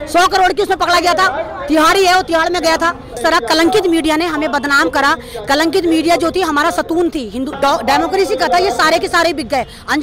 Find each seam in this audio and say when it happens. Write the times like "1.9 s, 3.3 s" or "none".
3.1 s, 7.5 s